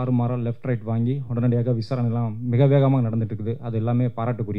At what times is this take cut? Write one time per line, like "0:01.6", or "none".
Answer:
none